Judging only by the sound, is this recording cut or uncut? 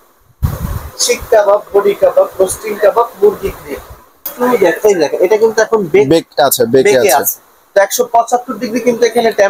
cut